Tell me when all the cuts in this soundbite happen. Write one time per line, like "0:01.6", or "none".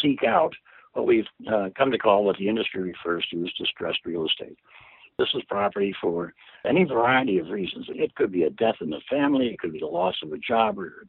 none

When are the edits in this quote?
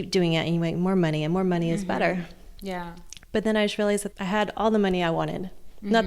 0:03.3
0:04.1

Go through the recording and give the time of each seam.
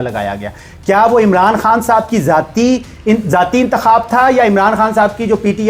none

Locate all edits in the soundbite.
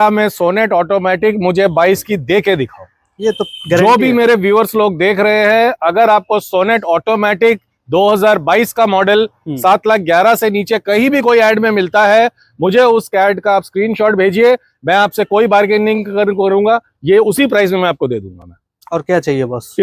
none

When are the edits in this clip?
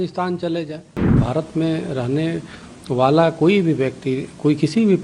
0:01.2

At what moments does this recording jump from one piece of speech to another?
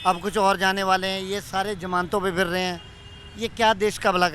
none

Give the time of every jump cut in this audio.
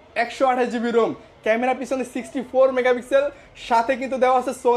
none

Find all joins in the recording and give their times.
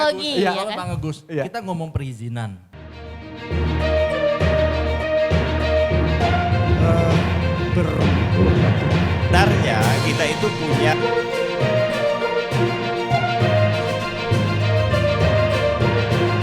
0:02.7

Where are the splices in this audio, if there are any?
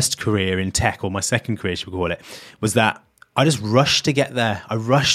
0:03.1

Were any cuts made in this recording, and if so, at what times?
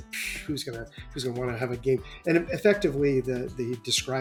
none

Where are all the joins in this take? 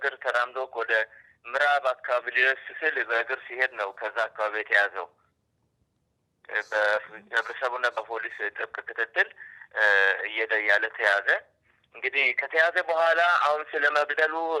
none

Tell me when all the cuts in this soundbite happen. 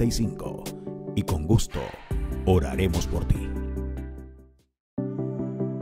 0:04.7

